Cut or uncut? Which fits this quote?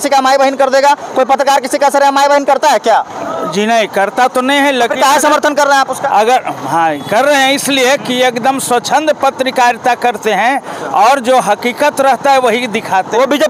uncut